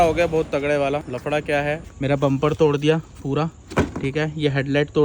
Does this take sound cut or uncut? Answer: cut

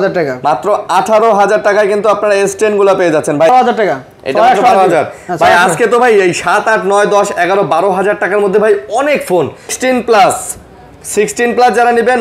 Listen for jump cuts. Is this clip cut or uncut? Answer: cut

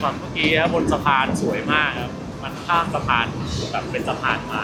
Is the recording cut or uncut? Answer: uncut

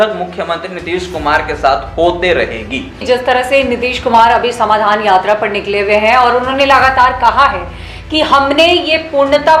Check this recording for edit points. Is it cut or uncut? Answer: cut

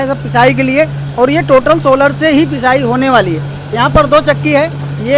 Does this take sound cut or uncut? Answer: uncut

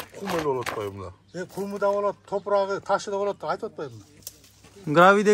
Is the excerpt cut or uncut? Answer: uncut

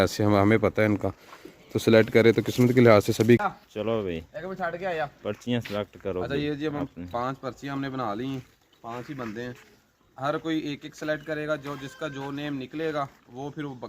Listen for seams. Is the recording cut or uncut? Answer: cut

